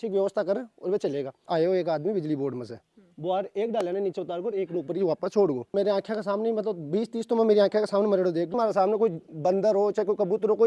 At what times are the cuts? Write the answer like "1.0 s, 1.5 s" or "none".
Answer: 1.4 s, 5.7 s, 8.5 s